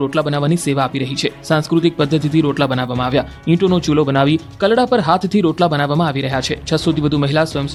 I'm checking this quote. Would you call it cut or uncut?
uncut